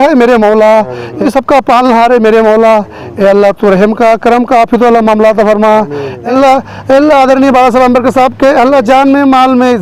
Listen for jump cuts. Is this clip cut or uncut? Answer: cut